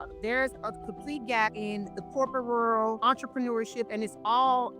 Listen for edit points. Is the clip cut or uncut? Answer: cut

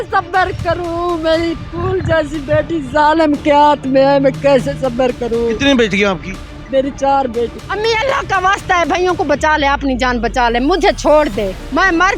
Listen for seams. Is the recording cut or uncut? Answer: cut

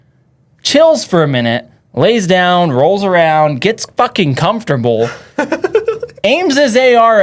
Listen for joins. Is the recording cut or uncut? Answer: uncut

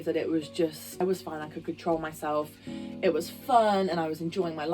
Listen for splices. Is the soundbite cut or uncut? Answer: cut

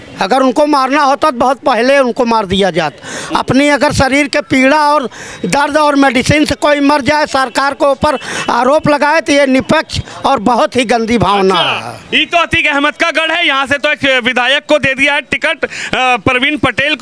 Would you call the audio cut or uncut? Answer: uncut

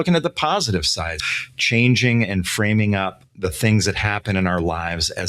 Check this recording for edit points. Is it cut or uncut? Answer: cut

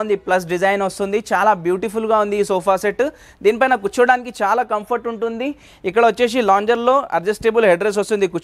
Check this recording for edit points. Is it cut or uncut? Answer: uncut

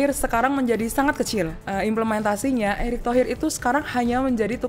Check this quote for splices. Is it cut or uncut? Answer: cut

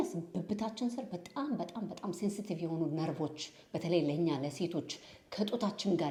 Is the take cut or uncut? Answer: uncut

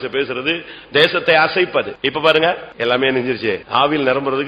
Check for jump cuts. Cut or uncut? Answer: cut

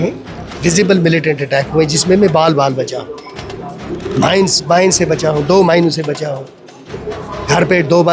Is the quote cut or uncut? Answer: uncut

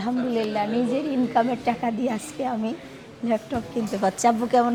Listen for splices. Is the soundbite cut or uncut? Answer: uncut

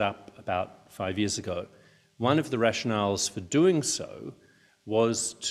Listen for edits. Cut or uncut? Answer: uncut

